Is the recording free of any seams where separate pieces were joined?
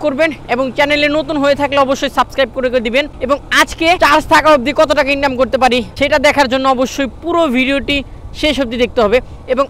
no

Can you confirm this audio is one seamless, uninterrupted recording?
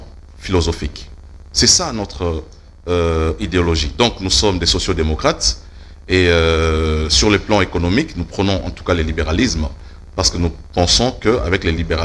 yes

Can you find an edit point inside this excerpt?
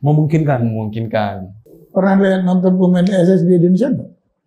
yes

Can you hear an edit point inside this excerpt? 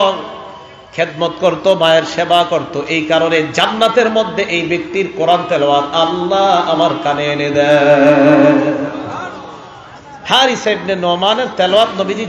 no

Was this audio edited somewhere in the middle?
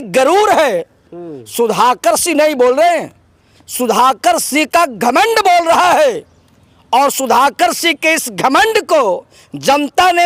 no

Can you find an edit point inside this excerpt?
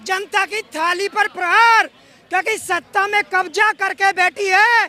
no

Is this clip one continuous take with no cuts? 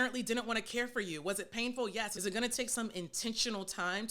no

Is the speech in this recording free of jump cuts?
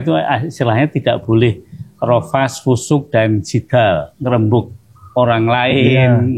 yes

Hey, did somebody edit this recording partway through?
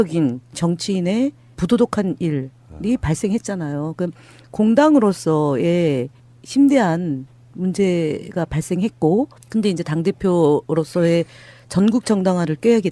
yes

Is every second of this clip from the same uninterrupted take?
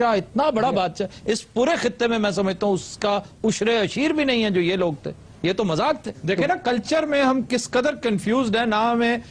no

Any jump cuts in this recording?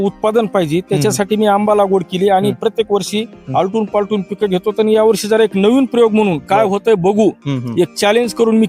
no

